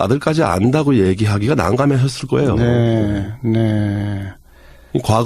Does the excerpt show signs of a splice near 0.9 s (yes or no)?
no